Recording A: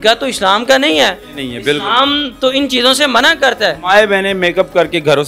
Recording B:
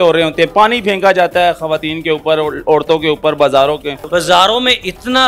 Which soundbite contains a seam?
B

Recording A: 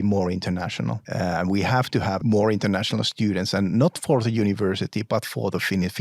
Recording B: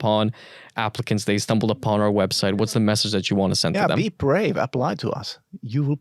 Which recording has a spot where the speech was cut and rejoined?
A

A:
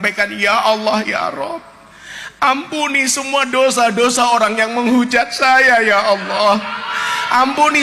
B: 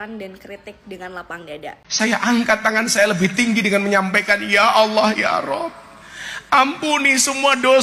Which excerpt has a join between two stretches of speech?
B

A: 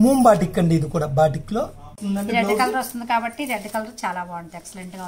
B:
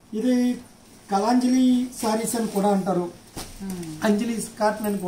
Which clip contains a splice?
A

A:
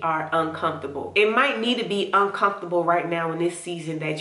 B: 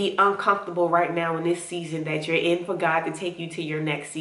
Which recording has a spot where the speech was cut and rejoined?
A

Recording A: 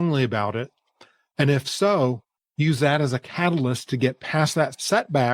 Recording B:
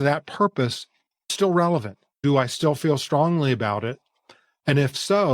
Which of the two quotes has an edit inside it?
B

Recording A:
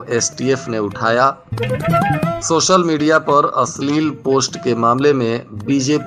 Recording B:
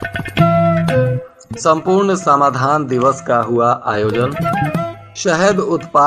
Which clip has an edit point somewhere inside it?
B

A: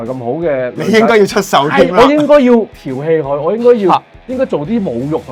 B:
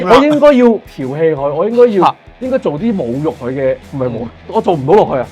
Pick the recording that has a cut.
B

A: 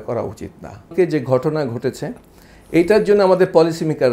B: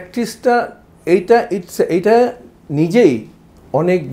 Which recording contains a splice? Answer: A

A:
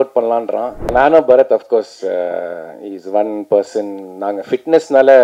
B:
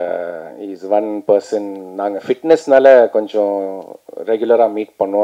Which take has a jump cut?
A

